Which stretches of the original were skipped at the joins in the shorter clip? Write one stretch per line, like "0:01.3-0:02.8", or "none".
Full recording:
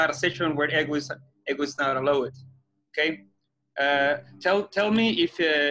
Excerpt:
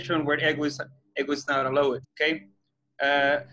0:02.4-0:02.8